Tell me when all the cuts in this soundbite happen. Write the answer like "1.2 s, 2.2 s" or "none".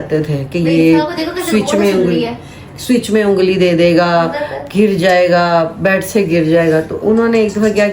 none